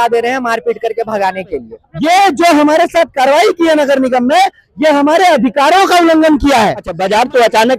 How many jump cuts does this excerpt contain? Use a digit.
2